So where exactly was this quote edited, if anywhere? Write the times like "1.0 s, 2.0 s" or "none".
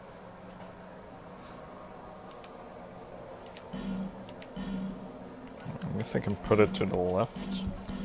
none